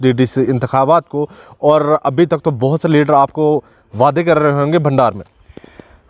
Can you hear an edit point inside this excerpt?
no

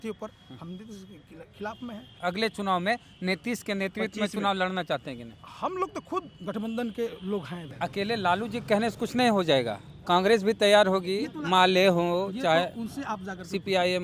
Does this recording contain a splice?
yes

